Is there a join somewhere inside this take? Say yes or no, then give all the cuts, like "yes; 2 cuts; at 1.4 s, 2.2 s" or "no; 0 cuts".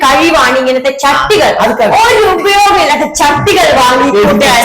no; 0 cuts